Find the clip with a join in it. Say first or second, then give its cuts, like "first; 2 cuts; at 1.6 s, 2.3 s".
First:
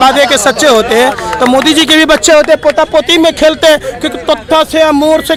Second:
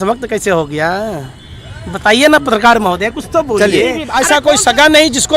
second; 1 cut; at 4.0 s